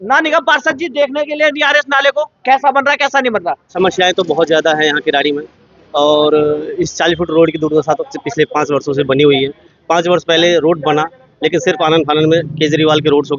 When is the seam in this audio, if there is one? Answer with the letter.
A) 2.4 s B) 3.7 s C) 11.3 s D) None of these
B